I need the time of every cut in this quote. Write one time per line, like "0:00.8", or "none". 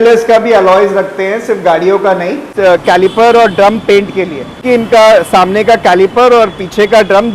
0:02.5
0:04.6